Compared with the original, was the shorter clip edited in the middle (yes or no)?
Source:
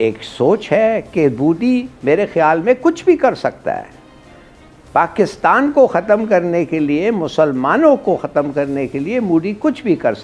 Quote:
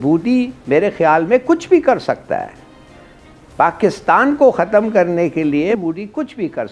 yes